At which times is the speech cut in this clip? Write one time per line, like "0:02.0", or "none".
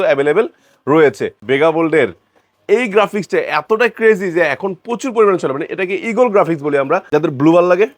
0:01.3
0:07.0